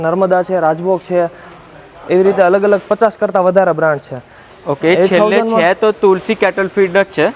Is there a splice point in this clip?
no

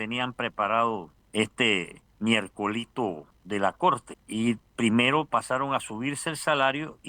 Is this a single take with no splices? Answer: no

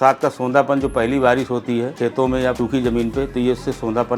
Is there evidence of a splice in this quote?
yes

